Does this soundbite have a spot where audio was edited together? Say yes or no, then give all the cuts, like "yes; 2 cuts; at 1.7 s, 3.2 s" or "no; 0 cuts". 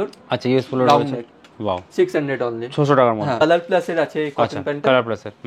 yes; 1 cut; at 3.4 s